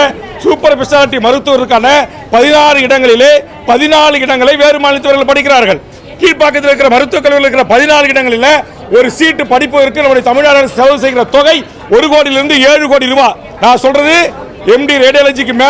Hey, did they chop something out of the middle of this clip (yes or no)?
no